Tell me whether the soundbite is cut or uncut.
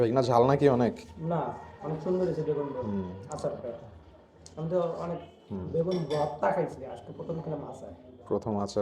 uncut